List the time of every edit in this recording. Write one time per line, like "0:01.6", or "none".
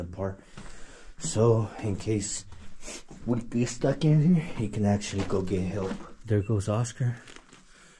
0:06.1